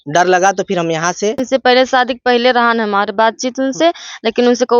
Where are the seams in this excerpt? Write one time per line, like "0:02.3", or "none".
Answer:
0:01.4

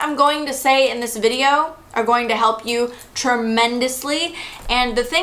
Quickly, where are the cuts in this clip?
none

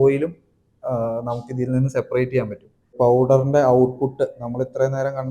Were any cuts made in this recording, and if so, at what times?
0:02.9

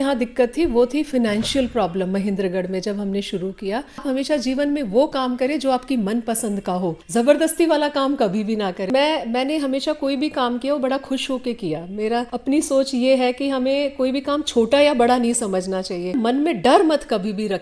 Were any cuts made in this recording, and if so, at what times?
0:04.0
0:07.0
0:08.9
0:12.3
0:16.2

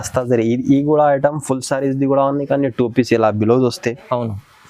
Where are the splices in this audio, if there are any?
none

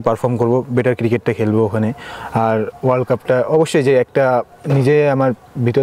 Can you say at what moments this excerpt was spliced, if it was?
none

